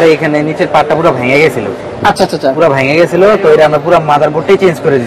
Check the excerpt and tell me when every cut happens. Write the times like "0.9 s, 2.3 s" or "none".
none